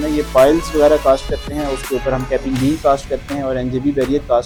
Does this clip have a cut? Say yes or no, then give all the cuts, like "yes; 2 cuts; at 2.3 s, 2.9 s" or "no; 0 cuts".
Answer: no; 0 cuts